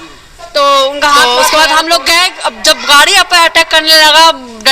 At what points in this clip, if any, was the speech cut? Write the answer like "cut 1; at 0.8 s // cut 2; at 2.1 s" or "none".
cut 1; at 1.2 s